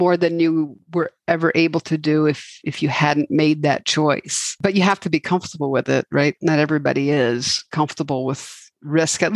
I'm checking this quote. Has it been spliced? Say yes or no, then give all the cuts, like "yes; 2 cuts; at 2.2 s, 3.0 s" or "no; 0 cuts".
yes; 2 cuts; at 4.6 s, 6.4 s